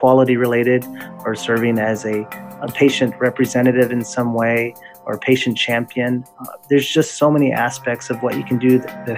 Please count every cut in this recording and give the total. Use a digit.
1